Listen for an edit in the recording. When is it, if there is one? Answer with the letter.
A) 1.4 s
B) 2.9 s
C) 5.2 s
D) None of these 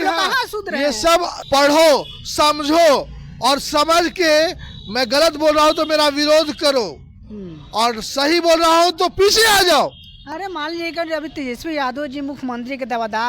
A